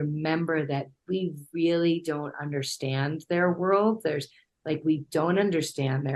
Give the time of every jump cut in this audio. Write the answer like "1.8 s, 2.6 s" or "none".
none